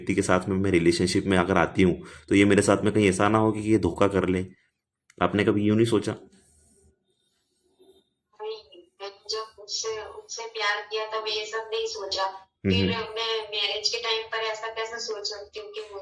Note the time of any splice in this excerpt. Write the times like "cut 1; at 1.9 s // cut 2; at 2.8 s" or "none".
none